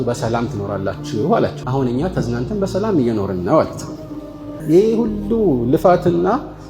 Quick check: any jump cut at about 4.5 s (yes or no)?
yes